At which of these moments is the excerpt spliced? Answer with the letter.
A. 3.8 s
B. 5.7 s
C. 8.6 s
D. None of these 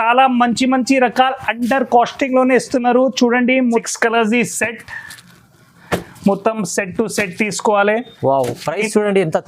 A